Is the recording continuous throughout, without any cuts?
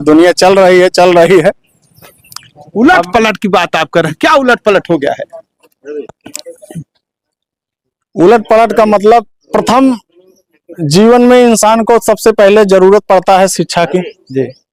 yes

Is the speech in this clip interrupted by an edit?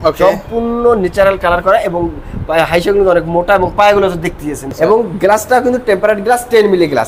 yes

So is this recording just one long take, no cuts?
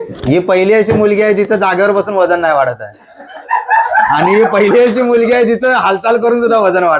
yes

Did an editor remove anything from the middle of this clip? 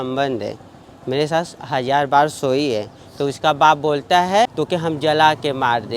yes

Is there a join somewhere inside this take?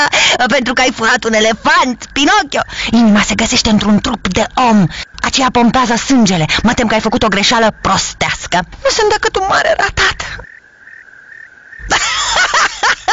yes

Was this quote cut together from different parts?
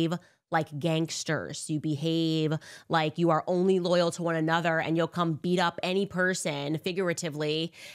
no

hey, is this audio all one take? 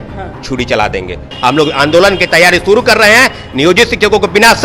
no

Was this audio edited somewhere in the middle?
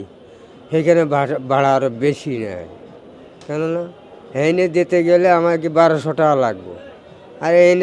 no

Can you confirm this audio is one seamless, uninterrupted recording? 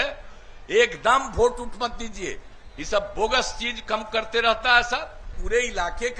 no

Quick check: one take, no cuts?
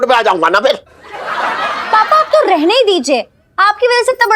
yes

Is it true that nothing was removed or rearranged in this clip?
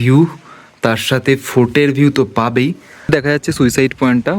no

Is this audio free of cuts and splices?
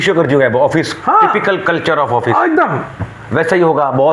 yes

